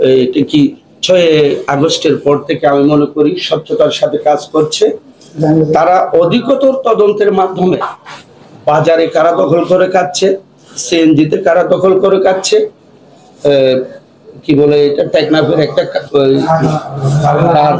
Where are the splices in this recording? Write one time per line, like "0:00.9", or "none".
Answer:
none